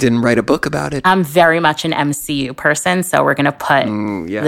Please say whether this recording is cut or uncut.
cut